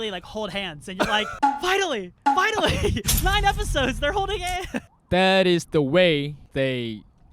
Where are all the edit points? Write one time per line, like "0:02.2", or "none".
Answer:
0:01.3
0:04.9
0:06.4